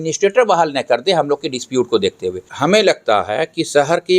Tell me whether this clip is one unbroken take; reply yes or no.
no